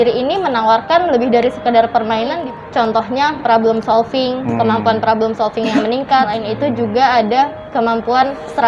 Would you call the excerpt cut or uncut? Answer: cut